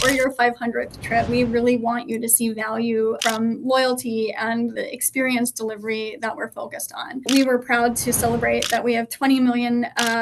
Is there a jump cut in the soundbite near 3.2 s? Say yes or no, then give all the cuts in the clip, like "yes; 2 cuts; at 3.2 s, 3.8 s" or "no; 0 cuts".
yes; 4 cuts; at 1.3 s, 3.2 s, 4.7 s, 7.3 s